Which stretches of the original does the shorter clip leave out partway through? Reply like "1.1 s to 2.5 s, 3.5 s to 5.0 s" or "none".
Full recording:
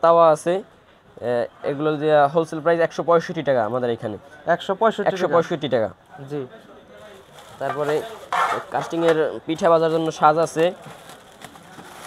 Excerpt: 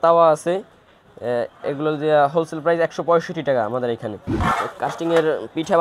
4.3 s to 8.2 s